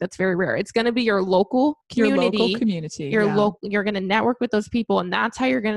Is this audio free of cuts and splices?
no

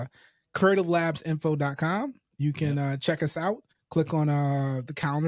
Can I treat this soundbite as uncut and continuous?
no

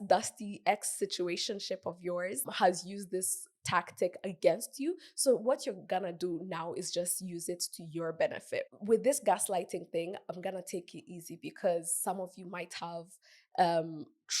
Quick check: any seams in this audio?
no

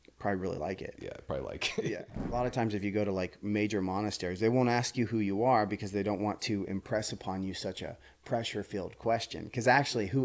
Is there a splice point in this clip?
yes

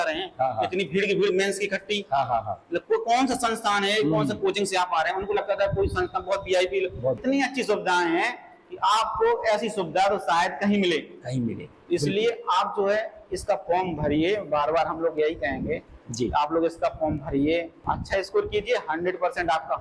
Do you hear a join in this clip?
yes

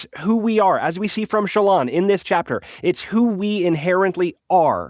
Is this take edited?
no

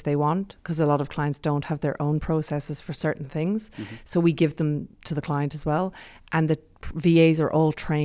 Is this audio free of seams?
yes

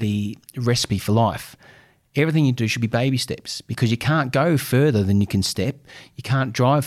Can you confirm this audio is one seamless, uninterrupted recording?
yes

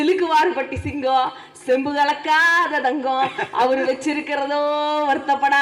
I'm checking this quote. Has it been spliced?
no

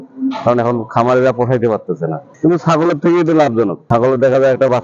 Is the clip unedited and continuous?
no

